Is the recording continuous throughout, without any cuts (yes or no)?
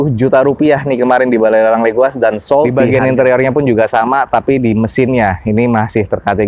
no